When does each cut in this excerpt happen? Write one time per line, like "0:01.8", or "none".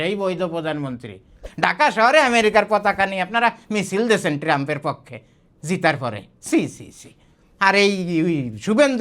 0:01.5